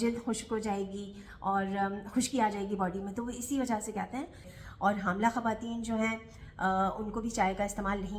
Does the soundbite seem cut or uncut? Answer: cut